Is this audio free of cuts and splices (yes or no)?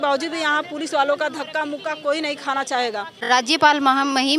no